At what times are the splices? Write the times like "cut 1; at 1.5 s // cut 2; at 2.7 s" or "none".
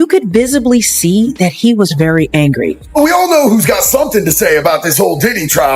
cut 1; at 2.8 s